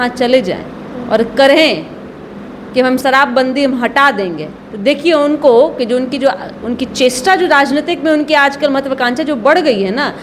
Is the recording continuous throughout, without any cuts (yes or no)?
no